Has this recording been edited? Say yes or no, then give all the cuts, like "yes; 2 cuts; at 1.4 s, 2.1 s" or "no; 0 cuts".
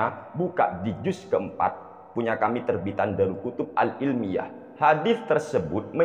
yes; 1 cut; at 4.6 s